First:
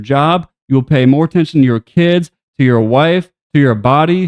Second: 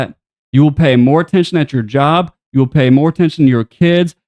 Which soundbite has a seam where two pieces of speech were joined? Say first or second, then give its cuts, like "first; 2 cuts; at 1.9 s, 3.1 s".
first; 1 cut; at 3.4 s